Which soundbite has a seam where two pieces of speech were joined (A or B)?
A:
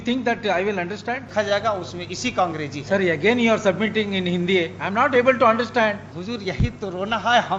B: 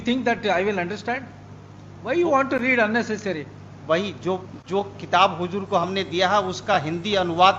A